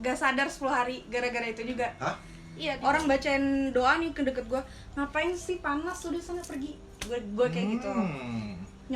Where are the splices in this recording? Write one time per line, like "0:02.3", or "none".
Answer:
0:02.7